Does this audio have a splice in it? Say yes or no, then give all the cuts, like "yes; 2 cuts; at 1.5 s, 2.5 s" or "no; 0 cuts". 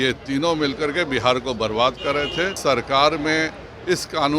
yes; 1 cut; at 2.6 s